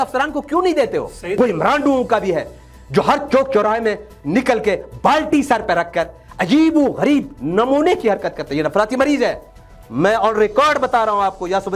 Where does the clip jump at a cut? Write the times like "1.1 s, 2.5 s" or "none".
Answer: 1.2 s, 9.4 s